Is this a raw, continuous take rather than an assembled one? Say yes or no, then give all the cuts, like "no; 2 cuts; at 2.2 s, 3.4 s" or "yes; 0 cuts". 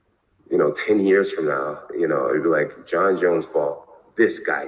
yes; 0 cuts